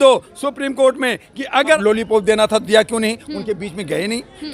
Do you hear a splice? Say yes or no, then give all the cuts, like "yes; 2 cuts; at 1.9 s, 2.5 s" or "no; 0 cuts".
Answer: yes; 1 cut; at 1.8 s